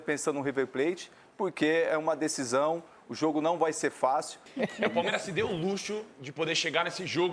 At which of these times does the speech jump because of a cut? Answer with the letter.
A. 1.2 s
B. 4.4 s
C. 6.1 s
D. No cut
B